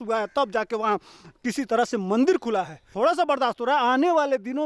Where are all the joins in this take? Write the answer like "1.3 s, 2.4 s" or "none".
2.9 s